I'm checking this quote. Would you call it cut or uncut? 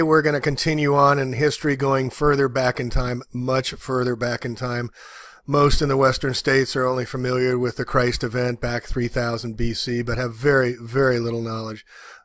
cut